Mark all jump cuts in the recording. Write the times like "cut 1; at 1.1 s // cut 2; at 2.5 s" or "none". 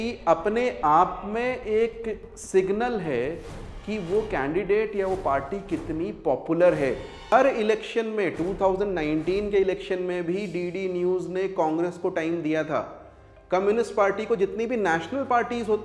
cut 1; at 7.2 s